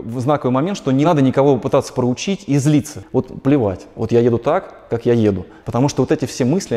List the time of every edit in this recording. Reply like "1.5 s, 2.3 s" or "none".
1.1 s, 2.9 s, 5.5 s